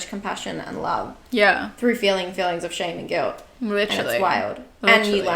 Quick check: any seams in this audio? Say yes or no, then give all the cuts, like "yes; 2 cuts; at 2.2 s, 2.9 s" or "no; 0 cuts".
no; 0 cuts